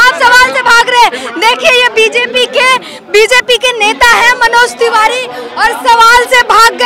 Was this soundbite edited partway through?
no; 0 cuts

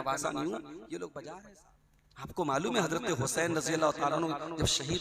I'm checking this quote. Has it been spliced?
yes; 1 cut; at 1.4 s

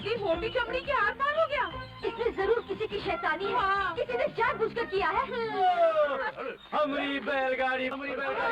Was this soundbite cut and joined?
yes; 1 cut; at 5.6 s

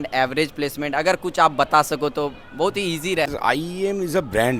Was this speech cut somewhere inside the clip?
yes; 1 cut; at 3.3 s

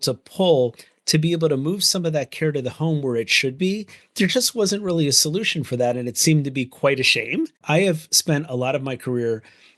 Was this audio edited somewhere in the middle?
yes; 1 cut; at 7.6 s

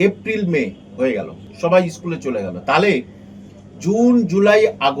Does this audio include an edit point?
yes; 1 cut; at 1.4 s

